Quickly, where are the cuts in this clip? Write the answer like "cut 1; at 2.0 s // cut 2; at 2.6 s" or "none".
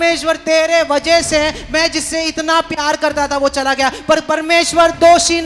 none